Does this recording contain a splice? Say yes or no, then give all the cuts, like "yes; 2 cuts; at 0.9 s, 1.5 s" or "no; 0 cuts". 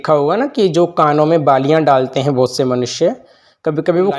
no; 0 cuts